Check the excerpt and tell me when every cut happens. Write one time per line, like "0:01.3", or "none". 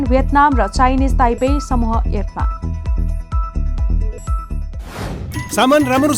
0:05.3

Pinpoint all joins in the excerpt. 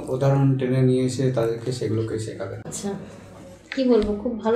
0:02.7

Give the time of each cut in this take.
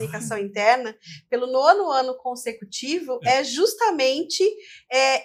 none

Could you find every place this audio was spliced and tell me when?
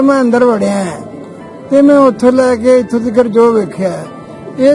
none

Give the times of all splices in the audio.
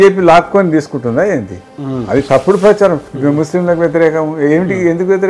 none

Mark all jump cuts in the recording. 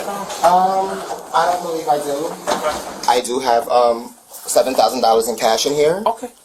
0:02.9

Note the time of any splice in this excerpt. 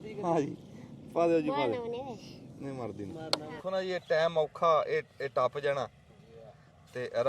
0:03.6

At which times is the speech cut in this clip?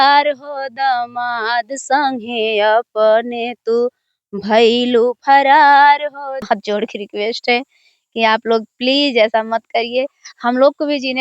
0:06.4

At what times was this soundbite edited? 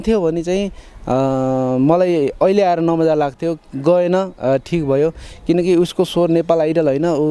none

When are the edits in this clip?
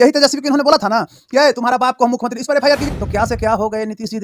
0:02.8

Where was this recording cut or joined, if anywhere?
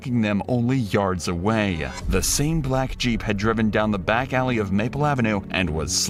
none

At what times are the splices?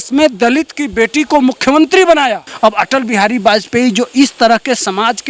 0:02.5

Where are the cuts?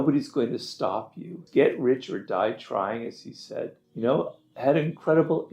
0:01.4
0:03.8

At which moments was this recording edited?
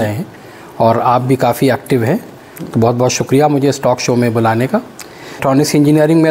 0:05.4

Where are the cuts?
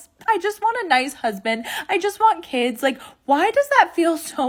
none

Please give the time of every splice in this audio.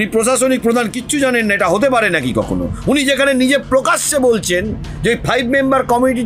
none

